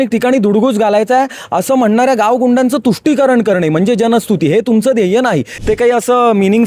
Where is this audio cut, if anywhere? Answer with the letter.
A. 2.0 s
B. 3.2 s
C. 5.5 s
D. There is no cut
C